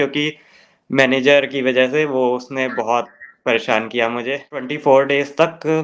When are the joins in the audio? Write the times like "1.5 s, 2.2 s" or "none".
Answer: 4.7 s